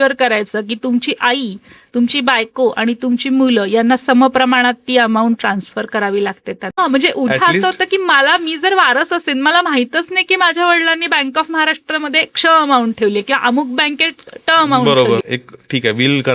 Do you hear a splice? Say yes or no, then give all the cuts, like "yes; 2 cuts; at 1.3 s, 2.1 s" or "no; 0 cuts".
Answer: yes; 2 cuts; at 6.8 s, 15.4 s